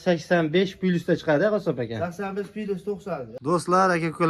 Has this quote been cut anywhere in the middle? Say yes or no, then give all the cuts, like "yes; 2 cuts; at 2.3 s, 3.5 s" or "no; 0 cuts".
yes; 1 cut; at 3.3 s